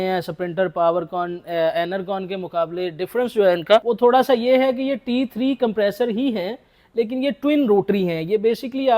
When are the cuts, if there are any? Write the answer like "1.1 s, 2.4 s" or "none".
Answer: 3.8 s